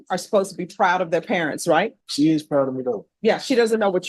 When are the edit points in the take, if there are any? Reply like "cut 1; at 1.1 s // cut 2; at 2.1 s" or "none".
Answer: cut 1; at 2.0 s // cut 2; at 3.1 s